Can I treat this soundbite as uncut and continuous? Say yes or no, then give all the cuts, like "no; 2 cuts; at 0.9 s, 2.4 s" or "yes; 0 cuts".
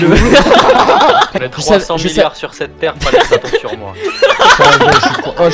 no; 1 cut; at 1.3 s